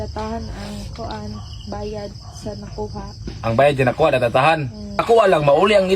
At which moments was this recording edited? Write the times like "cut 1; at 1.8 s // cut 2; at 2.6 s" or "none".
cut 1; at 5.0 s